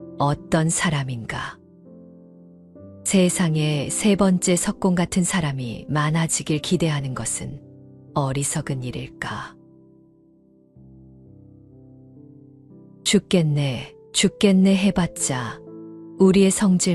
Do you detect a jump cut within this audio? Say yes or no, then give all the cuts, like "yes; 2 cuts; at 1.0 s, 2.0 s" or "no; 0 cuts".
yes; 2 cuts; at 9.5 s, 13.1 s